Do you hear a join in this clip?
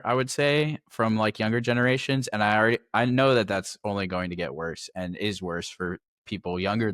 no; 0 cuts

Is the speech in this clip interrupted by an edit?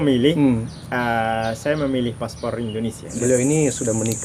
yes; 1 cut; at 3.1 s

